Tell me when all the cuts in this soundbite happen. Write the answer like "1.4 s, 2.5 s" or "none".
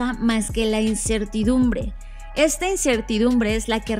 none